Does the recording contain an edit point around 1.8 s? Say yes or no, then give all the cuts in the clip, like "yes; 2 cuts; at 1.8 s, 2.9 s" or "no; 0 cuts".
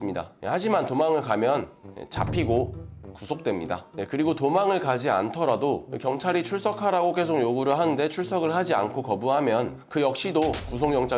no; 0 cuts